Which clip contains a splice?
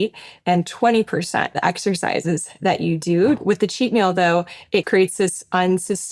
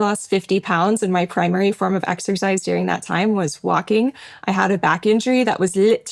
first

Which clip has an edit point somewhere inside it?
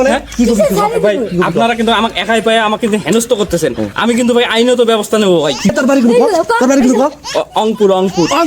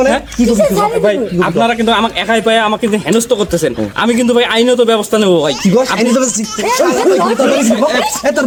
first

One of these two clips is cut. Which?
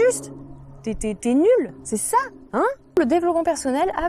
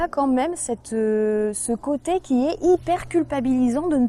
first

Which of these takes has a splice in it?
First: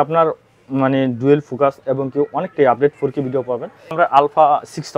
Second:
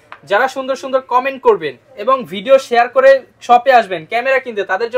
first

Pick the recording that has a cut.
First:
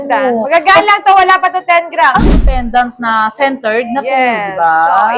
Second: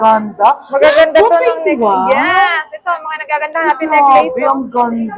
first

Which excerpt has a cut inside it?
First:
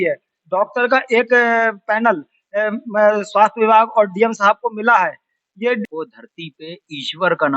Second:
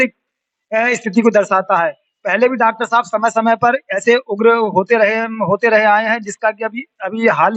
first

